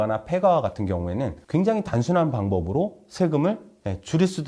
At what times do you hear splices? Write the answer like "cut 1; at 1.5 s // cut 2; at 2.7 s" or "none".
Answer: cut 1; at 1.4 s